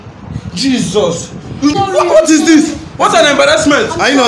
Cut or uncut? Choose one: cut